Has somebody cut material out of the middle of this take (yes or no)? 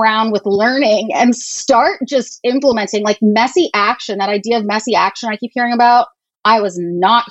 no